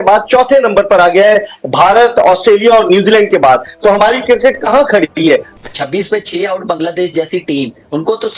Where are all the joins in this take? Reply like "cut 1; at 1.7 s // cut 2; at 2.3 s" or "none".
cut 1; at 5.5 s